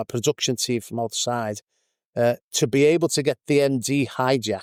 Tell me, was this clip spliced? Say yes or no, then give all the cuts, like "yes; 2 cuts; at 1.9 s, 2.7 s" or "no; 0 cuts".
no; 0 cuts